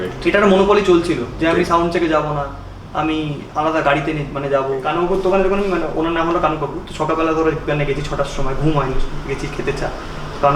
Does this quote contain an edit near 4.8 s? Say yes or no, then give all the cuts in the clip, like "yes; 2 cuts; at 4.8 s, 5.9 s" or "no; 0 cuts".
yes; 1 cut; at 4.8 s